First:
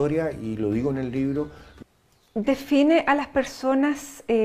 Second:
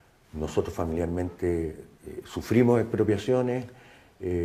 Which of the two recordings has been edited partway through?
first; 1 cut; at 1.6 s

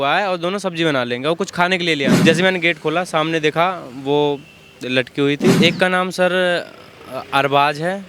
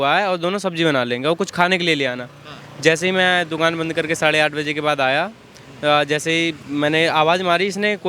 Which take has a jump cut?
first; 2 cuts; at 2.2 s, 5.6 s

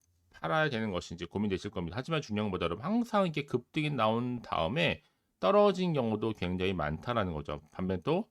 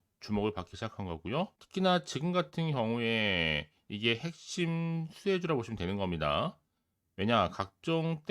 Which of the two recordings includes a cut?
second; 1 cut; at 1.6 s

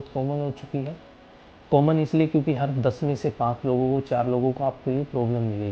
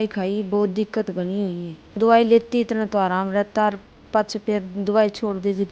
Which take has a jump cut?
second; 1 cut; at 2.0 s

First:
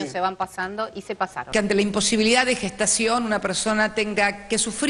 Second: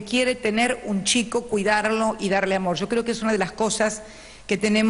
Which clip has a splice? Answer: first; 1 cut; at 1.5 s

